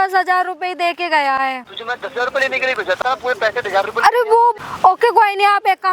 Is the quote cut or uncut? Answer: cut